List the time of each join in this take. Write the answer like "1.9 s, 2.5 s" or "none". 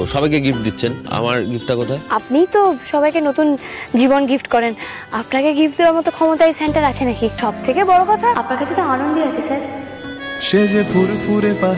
1.0 s, 2.0 s, 7.4 s, 8.4 s